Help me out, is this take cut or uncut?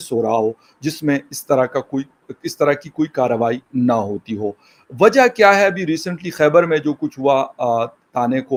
uncut